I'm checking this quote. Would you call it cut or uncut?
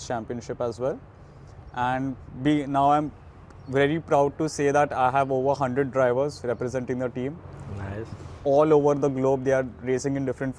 uncut